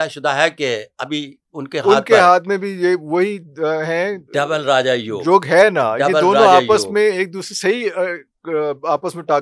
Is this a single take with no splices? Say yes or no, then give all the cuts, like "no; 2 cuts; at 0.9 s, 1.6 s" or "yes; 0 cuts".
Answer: yes; 0 cuts